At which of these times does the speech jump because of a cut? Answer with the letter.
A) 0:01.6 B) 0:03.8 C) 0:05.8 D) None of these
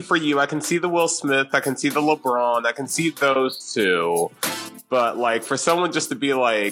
D